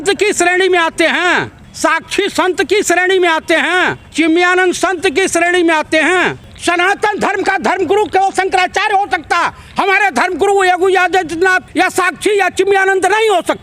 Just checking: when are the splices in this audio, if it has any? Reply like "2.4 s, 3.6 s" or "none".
1.6 s, 4.0 s, 6.5 s, 11.6 s